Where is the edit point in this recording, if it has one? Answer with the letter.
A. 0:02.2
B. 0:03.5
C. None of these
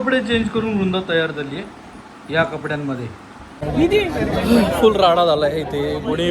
B